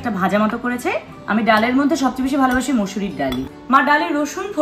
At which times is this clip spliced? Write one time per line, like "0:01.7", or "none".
none